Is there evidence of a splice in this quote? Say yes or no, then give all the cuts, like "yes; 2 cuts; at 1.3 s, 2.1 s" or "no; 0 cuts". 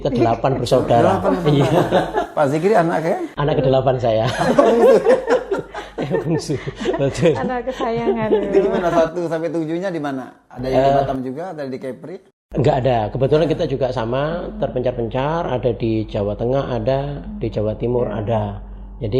no; 0 cuts